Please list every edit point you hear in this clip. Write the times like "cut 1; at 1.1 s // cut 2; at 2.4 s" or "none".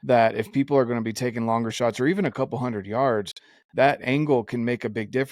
none